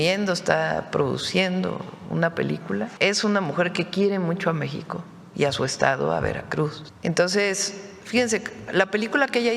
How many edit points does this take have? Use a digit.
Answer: 2